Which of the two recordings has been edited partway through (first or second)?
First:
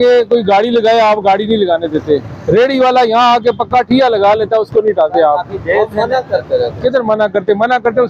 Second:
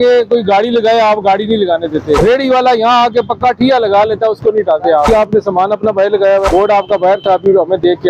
second